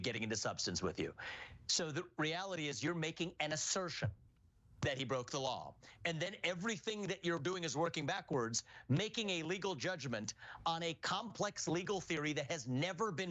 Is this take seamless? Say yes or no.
no